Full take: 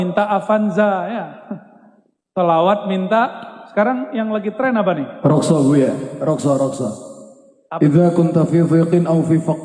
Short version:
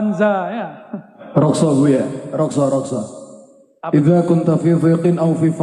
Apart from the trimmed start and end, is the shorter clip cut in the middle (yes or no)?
yes